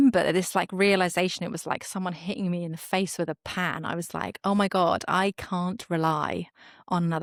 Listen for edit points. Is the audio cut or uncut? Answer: uncut